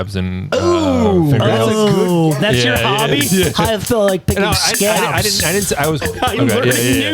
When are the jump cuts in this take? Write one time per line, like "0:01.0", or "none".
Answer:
0:06.1